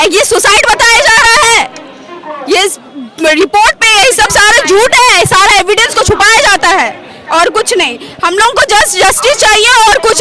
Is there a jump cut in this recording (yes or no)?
no